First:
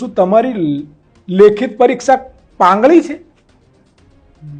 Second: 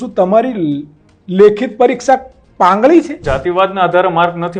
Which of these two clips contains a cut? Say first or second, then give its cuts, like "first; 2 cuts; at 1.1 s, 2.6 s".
second; 1 cut; at 3.2 s